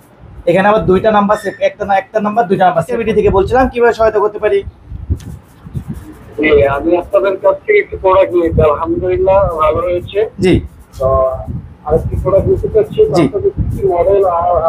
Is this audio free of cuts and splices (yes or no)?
no